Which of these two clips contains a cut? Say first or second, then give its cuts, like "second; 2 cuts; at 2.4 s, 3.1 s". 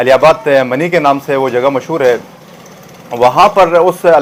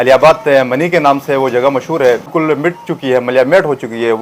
second; 1 cut; at 2.3 s